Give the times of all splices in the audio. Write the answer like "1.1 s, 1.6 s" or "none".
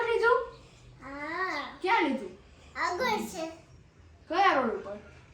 none